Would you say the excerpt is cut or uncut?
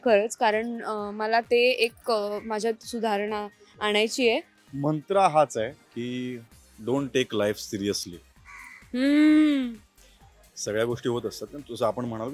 cut